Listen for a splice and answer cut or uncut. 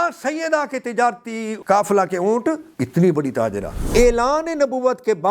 cut